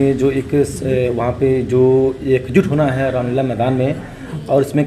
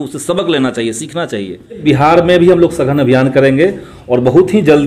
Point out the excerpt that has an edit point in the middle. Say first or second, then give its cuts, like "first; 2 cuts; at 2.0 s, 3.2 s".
second; 1 cut; at 1.8 s